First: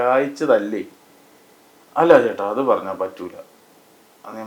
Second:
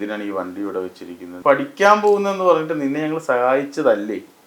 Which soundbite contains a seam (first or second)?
second